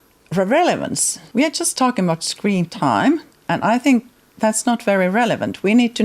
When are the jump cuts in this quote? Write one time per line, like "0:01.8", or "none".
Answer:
0:01.2
0:03.3